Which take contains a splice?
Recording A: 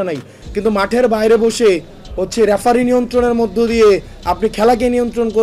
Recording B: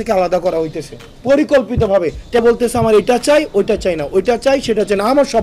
B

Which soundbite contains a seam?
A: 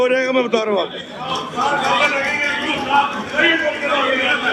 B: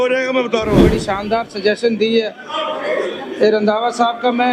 B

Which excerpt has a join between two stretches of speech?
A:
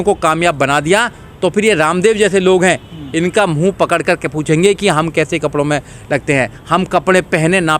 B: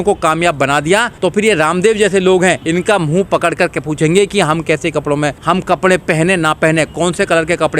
B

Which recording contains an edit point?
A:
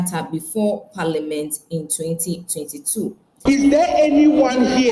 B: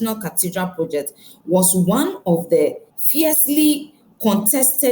A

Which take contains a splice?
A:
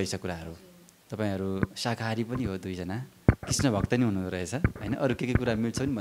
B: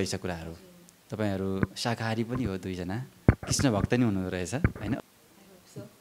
B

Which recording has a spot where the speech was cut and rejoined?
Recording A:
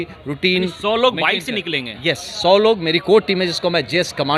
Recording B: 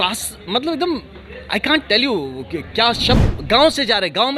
B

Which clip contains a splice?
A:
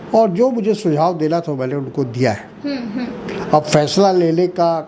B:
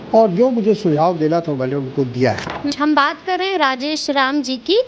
B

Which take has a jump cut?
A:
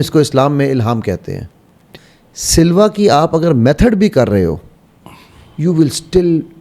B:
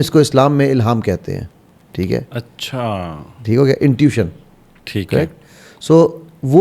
A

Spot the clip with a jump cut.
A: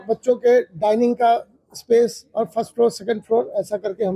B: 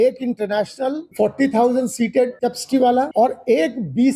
B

